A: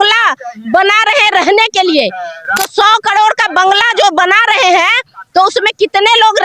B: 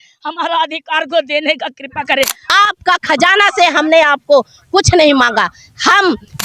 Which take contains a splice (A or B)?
B